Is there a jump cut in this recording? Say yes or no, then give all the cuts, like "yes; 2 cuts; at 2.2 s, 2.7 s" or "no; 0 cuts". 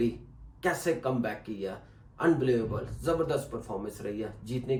no; 0 cuts